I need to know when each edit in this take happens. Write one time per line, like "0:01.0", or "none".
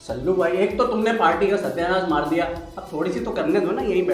none